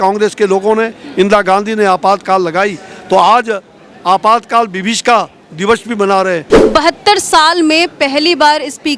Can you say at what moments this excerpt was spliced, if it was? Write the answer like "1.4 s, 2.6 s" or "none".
6.5 s